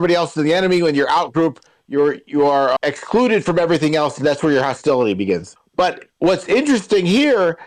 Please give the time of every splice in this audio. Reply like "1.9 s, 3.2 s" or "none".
2.8 s, 5.6 s